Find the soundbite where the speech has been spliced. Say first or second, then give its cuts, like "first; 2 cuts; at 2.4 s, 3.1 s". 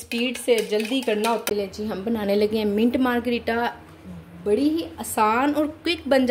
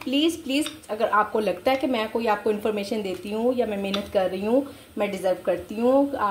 first; 1 cut; at 1.4 s